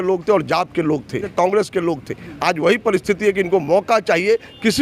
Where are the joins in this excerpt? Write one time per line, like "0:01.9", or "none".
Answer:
0:01.3

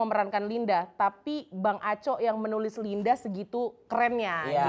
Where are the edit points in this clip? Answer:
none

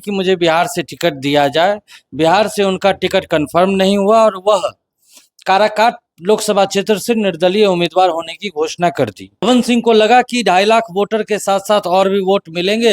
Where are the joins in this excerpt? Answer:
0:09.4

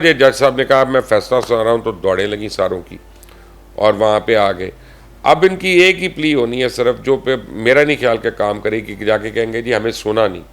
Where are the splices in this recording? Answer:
none

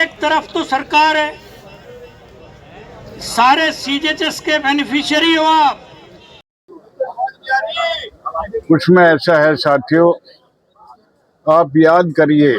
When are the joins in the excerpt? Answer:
0:06.8

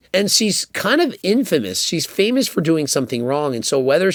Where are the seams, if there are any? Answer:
none

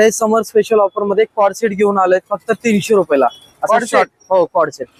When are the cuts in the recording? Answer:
none

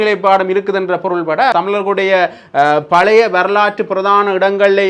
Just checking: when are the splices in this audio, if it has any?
0:01.5

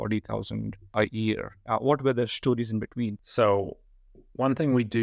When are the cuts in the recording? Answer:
0:03.2

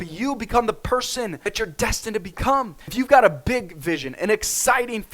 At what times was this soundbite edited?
0:01.4
0:02.8

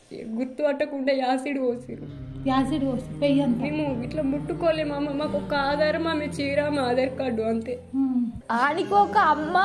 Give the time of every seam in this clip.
0:08.4

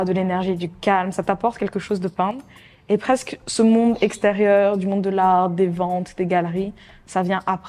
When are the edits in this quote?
none

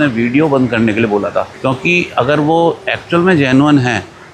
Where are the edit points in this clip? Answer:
none

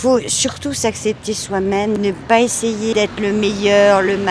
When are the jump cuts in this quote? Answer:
none

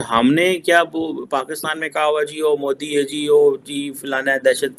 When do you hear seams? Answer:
none

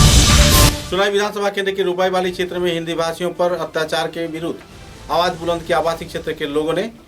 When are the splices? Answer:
none

